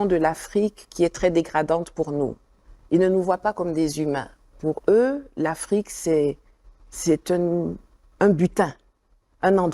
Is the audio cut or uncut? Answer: cut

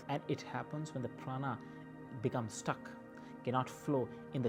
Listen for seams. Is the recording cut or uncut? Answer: uncut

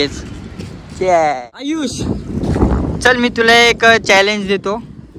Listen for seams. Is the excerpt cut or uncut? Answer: cut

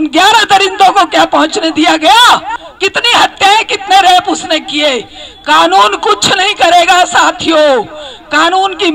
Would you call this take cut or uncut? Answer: cut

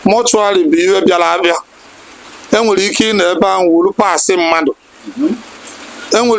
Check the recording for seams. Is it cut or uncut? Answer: uncut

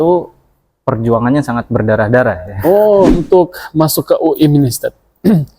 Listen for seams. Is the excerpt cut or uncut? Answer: cut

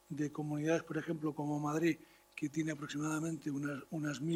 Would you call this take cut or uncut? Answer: uncut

